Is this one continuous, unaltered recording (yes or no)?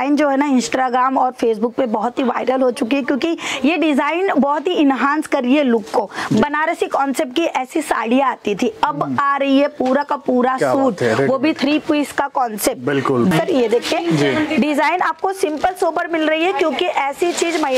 no